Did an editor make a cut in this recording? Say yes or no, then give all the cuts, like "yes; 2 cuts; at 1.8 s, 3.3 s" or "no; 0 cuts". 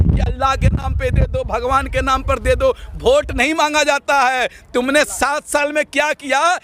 no; 0 cuts